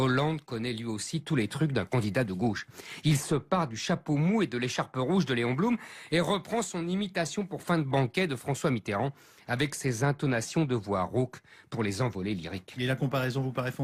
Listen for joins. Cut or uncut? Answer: cut